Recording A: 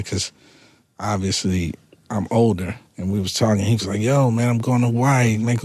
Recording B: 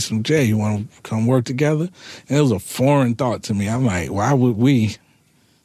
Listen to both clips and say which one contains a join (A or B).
A